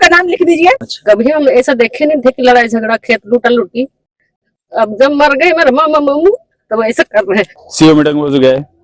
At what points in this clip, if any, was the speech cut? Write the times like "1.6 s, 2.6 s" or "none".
0.9 s, 7.6 s